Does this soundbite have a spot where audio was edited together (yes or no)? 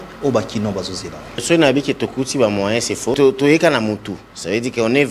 yes